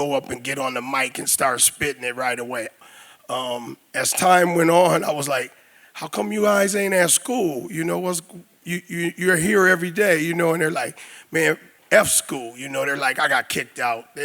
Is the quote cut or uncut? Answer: cut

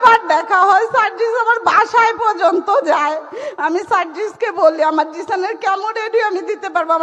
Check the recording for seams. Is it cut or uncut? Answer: uncut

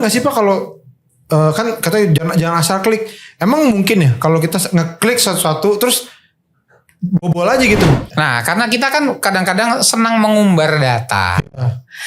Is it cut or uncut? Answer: cut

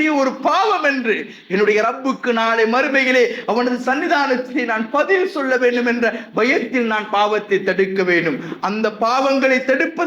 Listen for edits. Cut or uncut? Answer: uncut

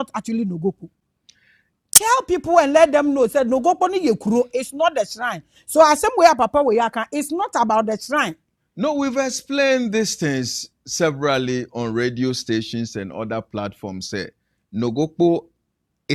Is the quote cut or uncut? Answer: uncut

